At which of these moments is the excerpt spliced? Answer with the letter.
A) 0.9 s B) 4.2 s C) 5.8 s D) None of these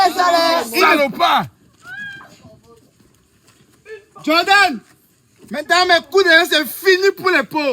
A